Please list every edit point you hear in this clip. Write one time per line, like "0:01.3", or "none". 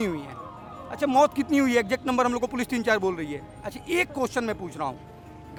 none